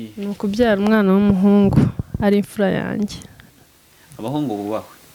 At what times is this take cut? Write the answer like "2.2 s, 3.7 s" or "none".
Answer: none